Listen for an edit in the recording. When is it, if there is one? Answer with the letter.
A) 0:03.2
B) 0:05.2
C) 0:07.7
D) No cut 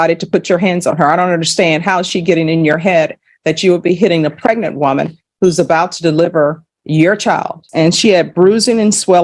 C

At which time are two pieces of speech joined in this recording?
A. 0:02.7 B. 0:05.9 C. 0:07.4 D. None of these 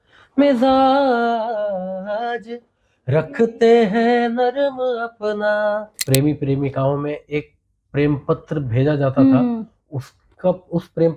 B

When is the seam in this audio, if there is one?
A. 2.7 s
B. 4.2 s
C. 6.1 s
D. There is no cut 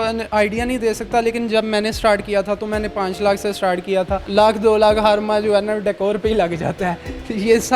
B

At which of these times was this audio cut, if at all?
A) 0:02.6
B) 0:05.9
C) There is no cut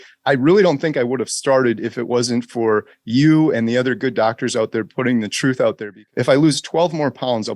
B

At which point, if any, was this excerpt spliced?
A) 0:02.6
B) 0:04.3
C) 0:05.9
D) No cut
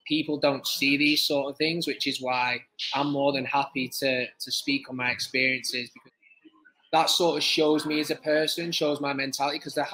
C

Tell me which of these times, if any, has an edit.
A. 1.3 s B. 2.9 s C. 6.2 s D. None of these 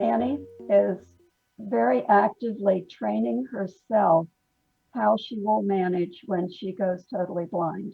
A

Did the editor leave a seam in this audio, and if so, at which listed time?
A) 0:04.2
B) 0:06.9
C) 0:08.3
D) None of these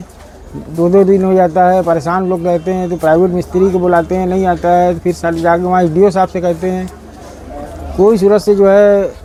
D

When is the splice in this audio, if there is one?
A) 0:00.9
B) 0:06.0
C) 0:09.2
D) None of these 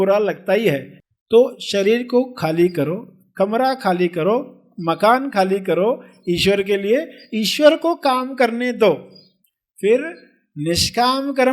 A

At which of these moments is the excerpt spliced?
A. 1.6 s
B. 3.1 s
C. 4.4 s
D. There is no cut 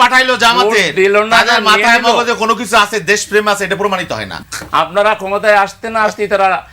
C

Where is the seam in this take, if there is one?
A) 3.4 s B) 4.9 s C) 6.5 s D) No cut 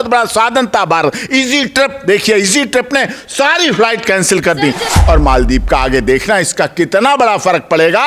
B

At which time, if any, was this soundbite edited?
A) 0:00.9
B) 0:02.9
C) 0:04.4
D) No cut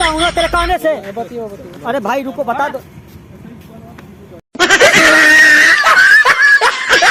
D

